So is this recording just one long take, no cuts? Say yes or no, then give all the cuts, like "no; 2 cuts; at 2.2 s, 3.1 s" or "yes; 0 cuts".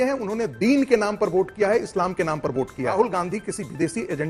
no; 1 cut; at 2.9 s